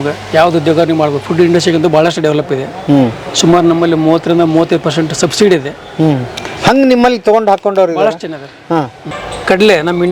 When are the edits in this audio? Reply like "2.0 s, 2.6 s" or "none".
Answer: 9.0 s

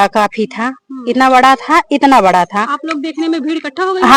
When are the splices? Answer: none

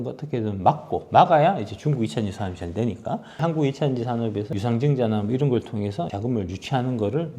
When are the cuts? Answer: 3.4 s, 4.5 s, 6.1 s

